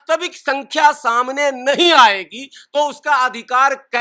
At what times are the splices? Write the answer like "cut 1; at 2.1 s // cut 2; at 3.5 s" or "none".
none